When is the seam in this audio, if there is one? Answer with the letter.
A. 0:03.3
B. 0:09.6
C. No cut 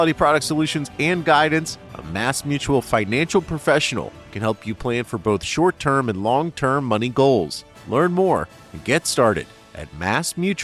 C